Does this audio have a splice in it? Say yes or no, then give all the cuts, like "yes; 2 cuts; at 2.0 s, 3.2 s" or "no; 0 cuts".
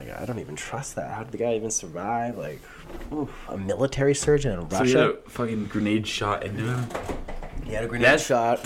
no; 0 cuts